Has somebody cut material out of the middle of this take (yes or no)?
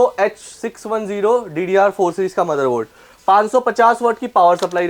no